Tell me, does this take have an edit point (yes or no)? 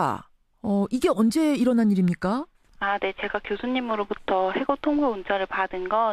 yes